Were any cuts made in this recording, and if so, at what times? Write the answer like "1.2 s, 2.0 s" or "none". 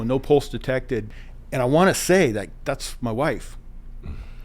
1.1 s